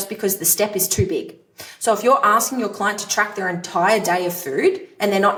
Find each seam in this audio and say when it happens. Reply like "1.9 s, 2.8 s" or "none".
none